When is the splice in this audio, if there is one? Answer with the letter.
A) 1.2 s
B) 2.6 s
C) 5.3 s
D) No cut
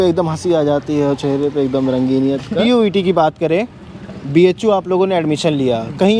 B